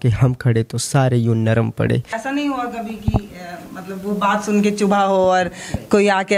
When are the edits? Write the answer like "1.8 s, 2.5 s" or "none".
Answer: 2.1 s